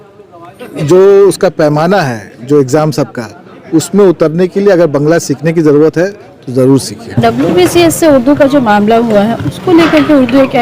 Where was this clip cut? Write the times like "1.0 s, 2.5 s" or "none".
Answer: 7.2 s